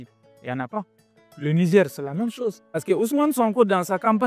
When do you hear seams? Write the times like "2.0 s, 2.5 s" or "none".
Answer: 2.7 s